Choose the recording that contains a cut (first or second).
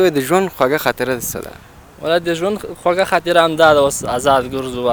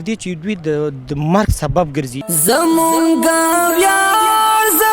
second